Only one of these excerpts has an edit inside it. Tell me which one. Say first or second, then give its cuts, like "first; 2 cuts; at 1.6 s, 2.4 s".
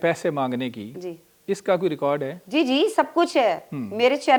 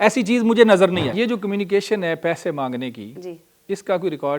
second; 1 cut; at 1.1 s